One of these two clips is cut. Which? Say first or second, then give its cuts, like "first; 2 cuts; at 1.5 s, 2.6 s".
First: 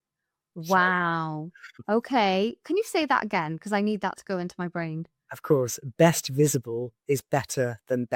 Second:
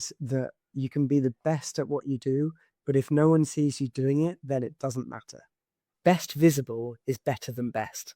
second; 1 cut; at 5.8 s